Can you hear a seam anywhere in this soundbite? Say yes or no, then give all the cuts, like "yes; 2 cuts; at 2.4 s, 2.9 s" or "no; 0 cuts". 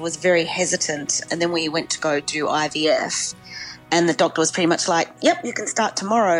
yes; 1 cut; at 1.2 s